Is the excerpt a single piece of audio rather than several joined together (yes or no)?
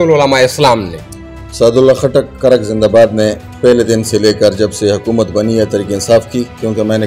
yes